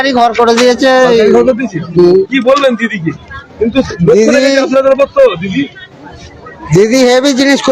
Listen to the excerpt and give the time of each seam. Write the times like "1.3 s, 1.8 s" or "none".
none